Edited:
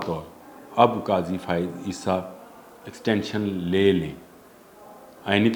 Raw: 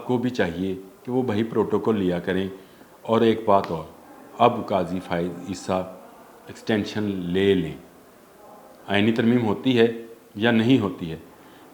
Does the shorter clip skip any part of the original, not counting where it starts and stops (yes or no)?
no